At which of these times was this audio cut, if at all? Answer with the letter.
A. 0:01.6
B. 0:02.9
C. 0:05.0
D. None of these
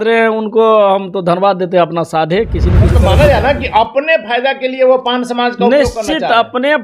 B